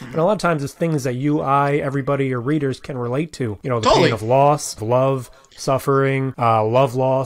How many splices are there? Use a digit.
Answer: 3